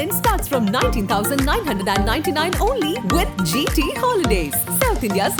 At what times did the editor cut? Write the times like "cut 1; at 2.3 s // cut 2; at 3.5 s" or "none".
none